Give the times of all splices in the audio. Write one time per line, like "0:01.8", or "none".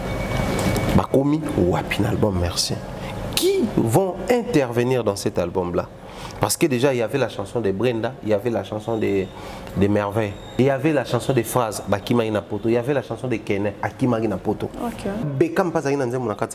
0:10.6
0:15.3